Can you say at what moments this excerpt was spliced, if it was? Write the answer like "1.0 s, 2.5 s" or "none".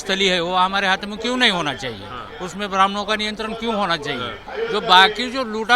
4.4 s